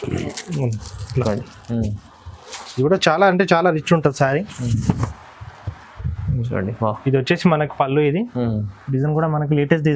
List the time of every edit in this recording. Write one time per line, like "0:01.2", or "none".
0:02.6